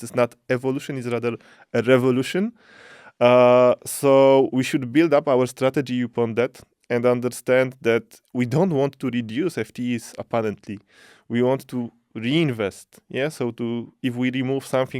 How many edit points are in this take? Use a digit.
0